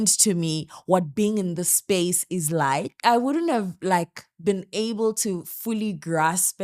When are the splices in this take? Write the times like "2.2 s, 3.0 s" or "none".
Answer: 3.0 s